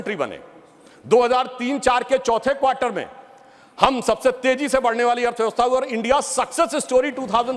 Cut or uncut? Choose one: uncut